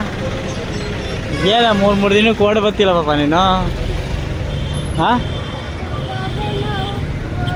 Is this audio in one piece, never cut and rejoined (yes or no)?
yes